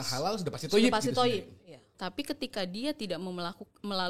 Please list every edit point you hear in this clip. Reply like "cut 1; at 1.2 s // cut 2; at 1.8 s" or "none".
cut 1; at 1.7 s

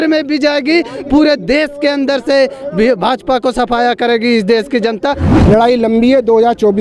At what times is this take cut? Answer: cut 1; at 5.3 s

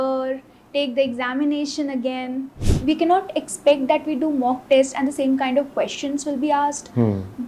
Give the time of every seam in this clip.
cut 1; at 2.7 s

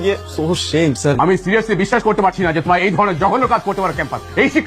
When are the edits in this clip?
cut 1; at 1.2 s

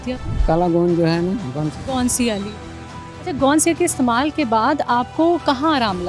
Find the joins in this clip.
none

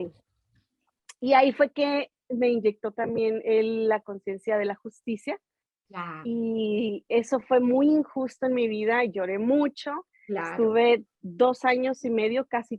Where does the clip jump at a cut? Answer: none

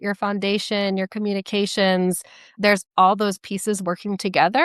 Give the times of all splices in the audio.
cut 1; at 2.5 s

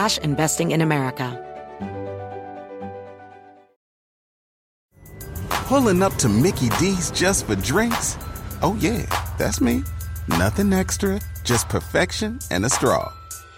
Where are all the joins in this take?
cut 1; at 1.3 s

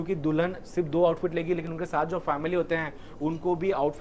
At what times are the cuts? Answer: none

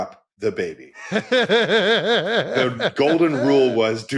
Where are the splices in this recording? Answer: cut 1; at 1.0 s // cut 2; at 2.5 s

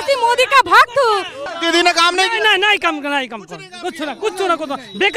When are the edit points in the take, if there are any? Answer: cut 1; at 1.4 s

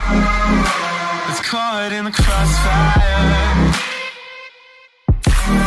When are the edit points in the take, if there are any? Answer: cut 1; at 1.3 s

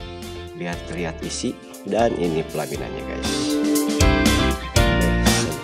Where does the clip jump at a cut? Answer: cut 1; at 3.2 s

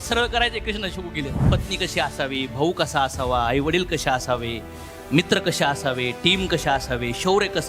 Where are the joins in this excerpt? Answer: cut 1; at 1.4 s

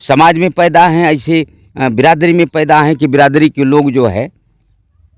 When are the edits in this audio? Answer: none

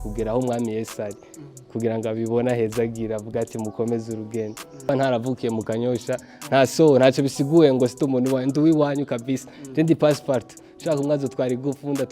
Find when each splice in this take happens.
cut 1; at 4.9 s

